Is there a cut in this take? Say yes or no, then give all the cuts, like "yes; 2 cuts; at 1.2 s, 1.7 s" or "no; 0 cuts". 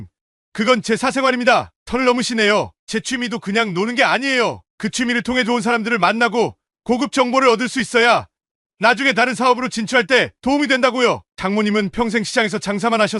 no; 0 cuts